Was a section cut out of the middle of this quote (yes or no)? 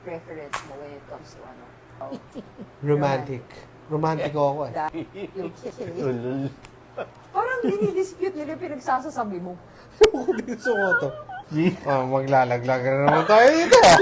yes